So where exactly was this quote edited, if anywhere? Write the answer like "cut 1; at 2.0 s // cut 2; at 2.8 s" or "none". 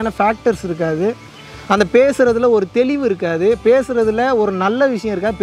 none

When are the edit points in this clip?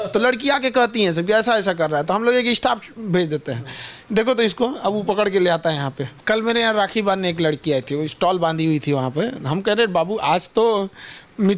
cut 1; at 6.0 s

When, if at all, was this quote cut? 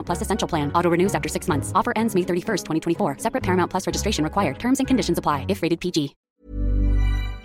cut 1; at 6.2 s

